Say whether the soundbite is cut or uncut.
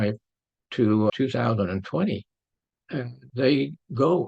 cut